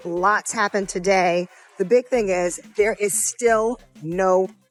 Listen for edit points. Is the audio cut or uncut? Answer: uncut